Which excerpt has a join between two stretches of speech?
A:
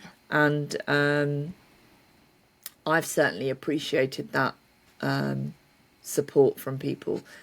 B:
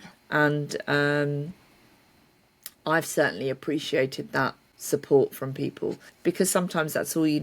B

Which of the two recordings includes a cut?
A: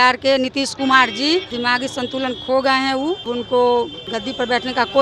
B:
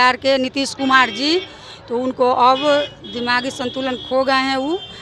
A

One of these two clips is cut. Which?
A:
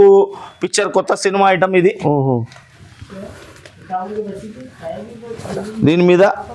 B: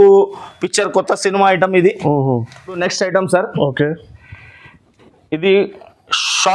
B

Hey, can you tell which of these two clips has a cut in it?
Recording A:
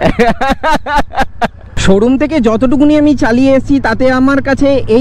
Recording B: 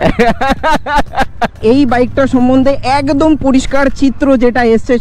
B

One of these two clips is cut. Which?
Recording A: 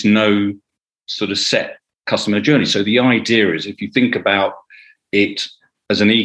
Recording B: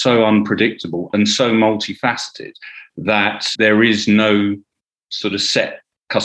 B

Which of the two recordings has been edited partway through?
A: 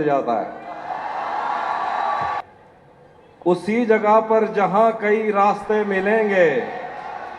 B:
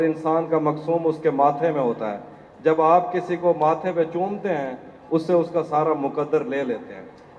A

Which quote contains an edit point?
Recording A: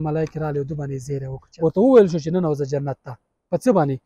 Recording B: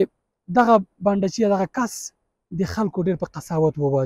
A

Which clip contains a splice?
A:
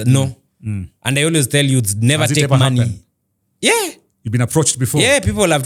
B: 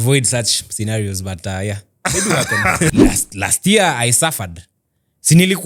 B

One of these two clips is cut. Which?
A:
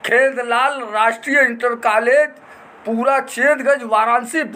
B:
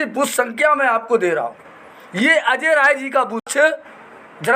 B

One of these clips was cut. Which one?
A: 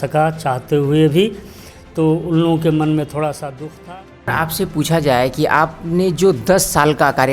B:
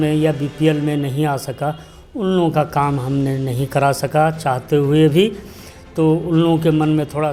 A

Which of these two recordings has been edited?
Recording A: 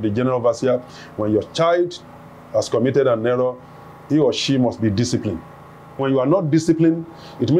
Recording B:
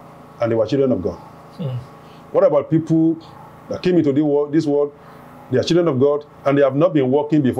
A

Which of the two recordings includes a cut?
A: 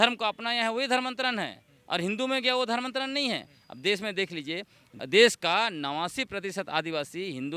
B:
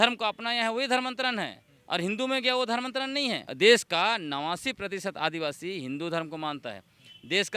B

